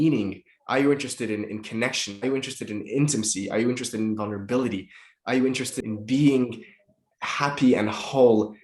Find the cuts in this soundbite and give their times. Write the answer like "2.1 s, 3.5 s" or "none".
5.8 s